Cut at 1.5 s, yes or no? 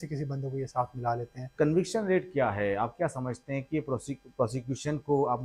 yes